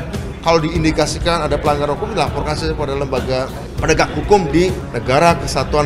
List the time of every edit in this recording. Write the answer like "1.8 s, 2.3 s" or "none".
3.6 s, 4.9 s